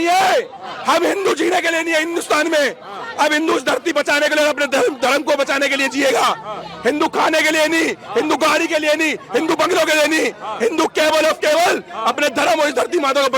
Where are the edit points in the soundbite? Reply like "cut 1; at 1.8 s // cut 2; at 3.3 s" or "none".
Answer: none